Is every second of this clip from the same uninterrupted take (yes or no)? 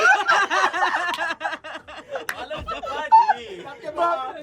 yes